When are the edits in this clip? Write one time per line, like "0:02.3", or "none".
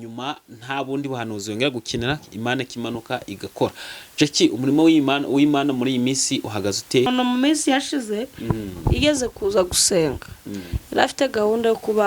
0:07.1